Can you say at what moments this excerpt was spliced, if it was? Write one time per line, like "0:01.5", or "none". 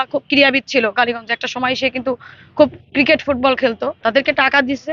0:03.9